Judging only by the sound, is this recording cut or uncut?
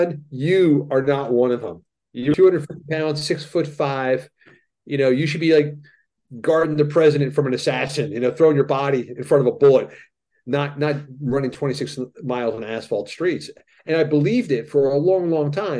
cut